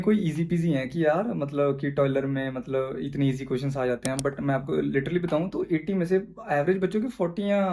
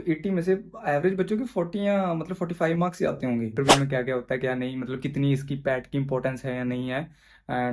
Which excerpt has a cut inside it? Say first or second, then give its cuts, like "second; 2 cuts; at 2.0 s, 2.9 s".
second; 1 cut; at 3.5 s